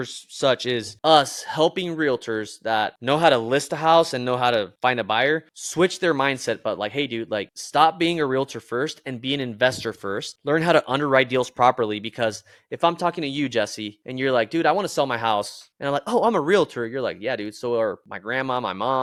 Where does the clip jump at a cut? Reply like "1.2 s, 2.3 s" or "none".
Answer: none